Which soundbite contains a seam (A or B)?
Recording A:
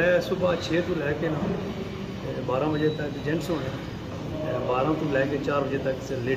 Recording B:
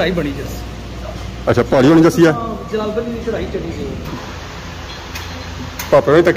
B